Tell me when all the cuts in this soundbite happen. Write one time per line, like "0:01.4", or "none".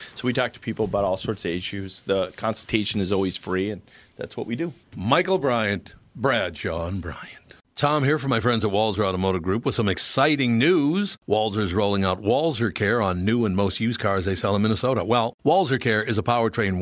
0:07.7